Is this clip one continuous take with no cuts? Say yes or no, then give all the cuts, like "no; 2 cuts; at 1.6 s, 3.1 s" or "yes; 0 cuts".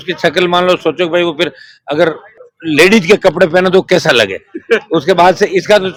yes; 0 cuts